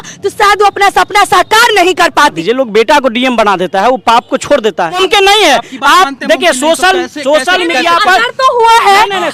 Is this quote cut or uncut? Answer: cut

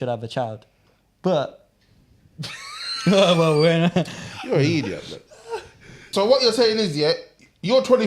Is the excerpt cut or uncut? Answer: cut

